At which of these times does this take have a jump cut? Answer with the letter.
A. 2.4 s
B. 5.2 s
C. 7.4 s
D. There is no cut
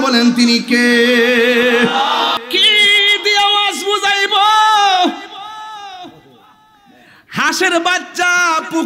A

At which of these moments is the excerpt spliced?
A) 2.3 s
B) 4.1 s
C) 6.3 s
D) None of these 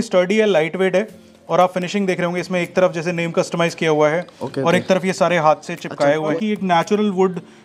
C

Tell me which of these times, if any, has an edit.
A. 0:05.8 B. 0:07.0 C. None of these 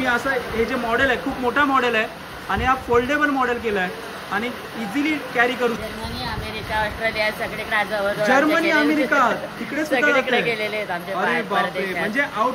A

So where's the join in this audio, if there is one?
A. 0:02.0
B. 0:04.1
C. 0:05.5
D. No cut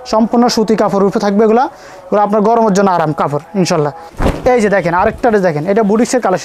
B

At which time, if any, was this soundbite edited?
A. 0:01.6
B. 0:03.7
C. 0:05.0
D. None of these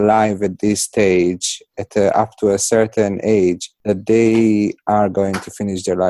B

